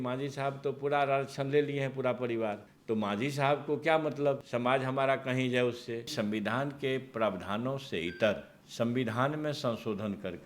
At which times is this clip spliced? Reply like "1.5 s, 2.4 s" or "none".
2.7 s, 4.5 s, 6.1 s, 8.6 s